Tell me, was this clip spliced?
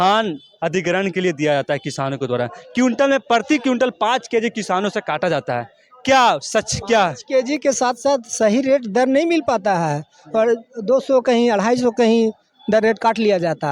no; 0 cuts

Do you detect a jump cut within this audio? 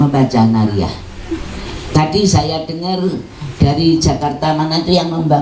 no; 0 cuts

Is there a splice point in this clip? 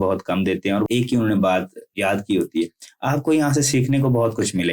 yes; 2 cuts; at 0.9 s, 1.9 s

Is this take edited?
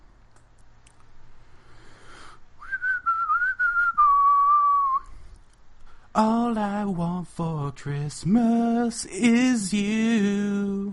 no; 0 cuts

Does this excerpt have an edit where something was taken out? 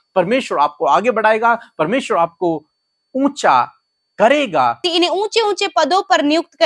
yes; 1 cut; at 4.8 s

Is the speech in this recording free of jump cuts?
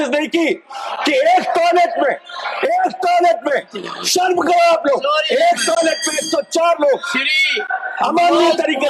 yes; 0 cuts

